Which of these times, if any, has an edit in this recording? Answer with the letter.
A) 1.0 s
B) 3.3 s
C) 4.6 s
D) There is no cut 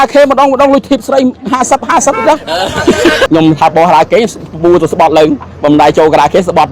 B